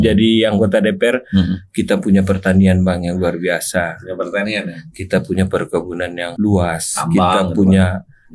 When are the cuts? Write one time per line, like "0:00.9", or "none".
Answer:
0:06.3